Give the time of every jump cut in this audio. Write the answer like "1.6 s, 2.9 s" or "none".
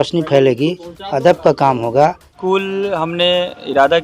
2.3 s